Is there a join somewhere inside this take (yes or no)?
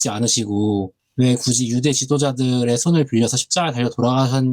yes